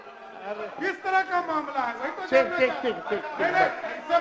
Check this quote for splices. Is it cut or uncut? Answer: uncut